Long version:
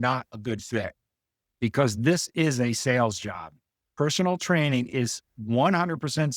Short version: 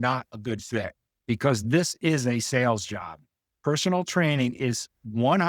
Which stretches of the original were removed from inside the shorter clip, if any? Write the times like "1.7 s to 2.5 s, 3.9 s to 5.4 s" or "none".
1.1 s to 1.4 s